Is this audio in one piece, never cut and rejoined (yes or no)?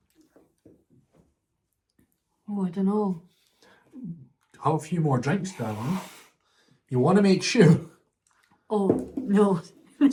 yes